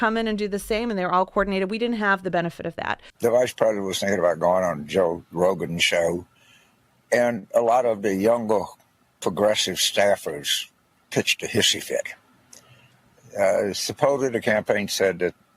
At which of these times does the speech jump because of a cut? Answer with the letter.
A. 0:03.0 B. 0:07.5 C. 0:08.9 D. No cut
A